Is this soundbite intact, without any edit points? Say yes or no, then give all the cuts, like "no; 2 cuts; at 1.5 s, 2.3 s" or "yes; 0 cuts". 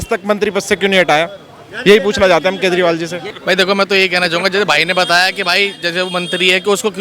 yes; 0 cuts